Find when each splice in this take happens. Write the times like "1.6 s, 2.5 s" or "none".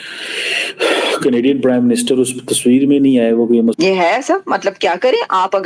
3.8 s